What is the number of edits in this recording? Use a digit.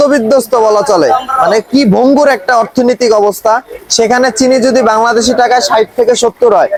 0